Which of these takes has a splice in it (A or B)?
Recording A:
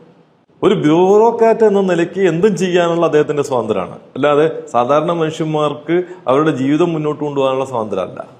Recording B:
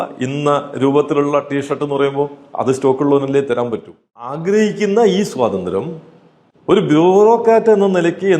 B